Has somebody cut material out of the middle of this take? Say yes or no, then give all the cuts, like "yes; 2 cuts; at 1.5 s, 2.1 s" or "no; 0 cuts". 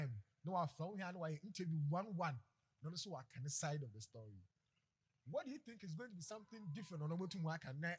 no; 0 cuts